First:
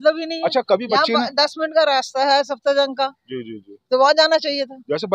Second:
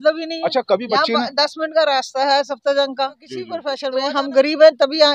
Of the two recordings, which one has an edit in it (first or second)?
second